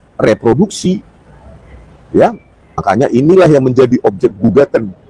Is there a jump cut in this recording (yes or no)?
yes